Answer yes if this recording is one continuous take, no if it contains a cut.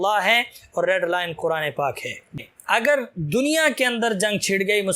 no